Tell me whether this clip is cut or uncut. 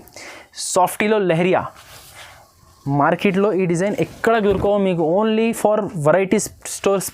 uncut